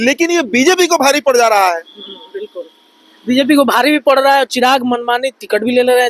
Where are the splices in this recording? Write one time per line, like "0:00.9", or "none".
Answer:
none

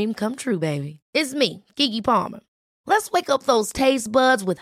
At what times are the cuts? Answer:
none

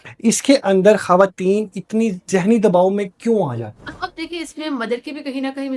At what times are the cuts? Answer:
0:02.2
0:04.1

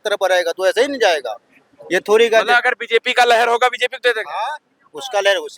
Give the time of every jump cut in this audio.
none

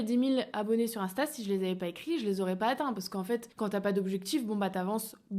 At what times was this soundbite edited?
0:03.5

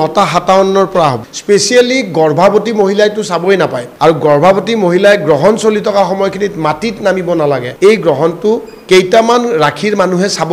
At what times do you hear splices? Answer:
0:01.3
0:03.8
0:07.7

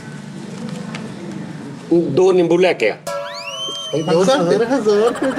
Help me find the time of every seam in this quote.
none

